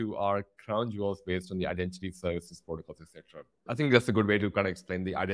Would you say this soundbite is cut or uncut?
uncut